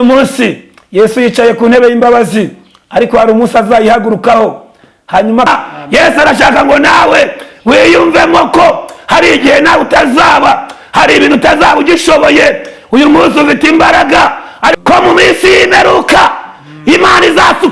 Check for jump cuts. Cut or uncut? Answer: cut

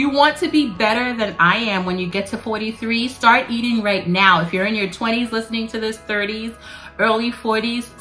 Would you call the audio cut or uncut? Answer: uncut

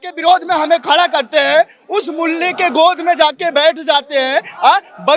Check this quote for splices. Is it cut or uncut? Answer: uncut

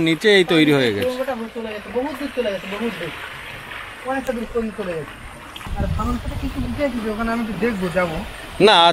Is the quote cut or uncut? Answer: cut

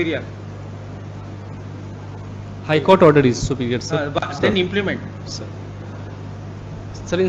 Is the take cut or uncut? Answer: uncut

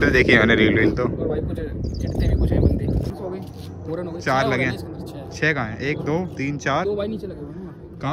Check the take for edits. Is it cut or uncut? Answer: cut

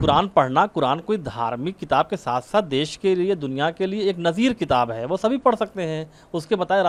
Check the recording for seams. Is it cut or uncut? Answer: uncut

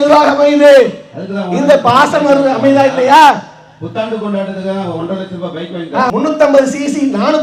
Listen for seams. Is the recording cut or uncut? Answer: uncut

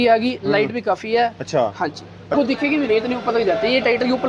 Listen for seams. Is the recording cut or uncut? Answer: cut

